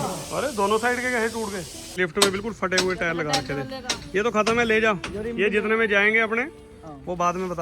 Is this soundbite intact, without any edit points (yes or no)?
no